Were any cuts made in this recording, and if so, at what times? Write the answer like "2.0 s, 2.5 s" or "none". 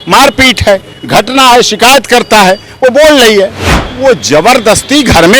3.7 s